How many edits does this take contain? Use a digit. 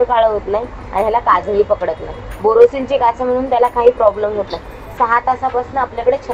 0